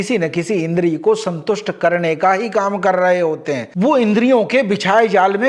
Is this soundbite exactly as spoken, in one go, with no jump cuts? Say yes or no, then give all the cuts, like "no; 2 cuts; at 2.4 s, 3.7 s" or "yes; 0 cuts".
no; 1 cut; at 3.6 s